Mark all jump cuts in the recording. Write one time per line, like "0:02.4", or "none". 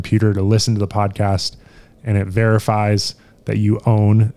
none